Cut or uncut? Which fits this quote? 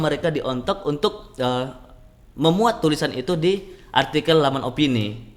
uncut